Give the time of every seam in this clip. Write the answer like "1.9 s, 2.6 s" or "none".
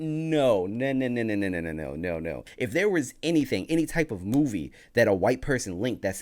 2.5 s